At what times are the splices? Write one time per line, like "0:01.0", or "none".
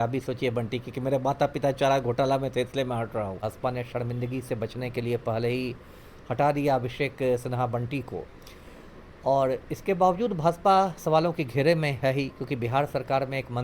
0:03.4